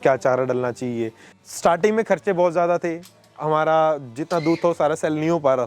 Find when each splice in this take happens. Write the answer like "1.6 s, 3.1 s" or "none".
1.4 s